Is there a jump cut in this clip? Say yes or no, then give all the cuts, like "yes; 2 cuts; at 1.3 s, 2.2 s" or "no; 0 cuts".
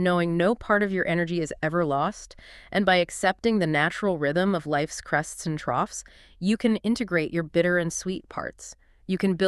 no; 0 cuts